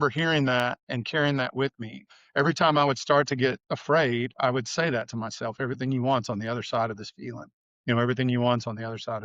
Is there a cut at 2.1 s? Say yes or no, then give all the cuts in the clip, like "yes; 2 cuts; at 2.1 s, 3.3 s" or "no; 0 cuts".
yes; 3 cuts; at 0.8 s, 2.1 s, 3.7 s